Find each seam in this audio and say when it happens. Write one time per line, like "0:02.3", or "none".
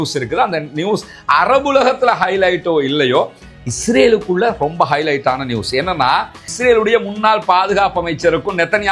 0:06.5